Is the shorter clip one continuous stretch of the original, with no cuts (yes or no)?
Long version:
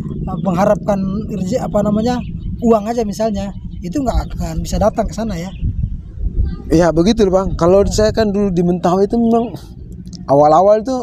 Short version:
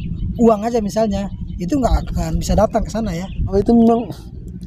no